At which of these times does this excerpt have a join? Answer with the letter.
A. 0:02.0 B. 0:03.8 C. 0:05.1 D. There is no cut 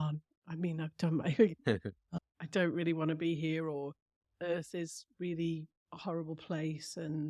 A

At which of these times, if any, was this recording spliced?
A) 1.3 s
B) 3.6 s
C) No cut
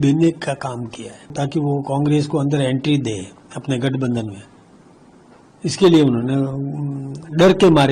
A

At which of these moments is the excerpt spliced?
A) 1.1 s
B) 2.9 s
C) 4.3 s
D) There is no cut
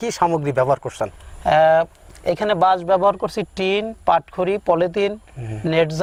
D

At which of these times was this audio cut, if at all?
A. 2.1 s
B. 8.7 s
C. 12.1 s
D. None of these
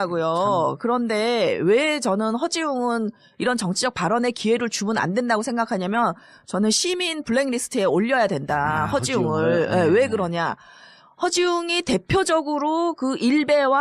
B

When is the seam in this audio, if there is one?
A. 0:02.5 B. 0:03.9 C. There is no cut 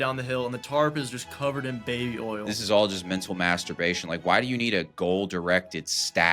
A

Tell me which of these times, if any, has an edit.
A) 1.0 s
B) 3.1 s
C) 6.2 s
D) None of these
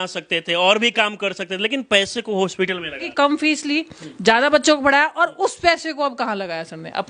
B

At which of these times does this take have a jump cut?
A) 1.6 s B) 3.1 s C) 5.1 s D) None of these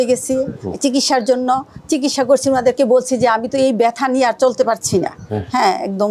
D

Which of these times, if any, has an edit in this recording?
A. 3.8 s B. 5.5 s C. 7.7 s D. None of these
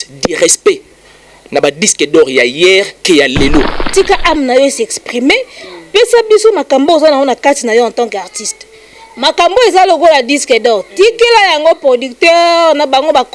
A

